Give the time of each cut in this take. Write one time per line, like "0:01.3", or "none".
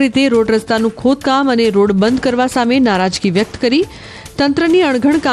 none